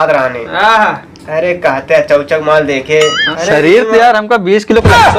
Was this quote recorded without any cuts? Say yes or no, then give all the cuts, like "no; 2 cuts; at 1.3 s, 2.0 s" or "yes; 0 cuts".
no; 1 cut; at 3.3 s